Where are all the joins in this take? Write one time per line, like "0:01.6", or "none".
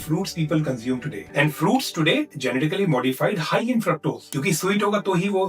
0:01.2
0:04.3